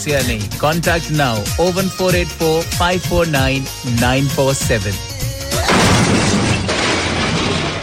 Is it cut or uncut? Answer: cut